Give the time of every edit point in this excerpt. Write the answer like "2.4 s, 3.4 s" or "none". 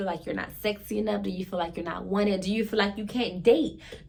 none